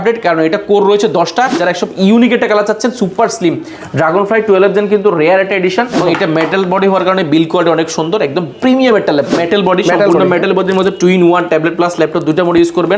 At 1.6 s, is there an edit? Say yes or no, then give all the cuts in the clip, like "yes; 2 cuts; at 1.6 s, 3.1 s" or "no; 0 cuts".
yes; 3 cuts; at 1.6 s, 5.9 s, 9.3 s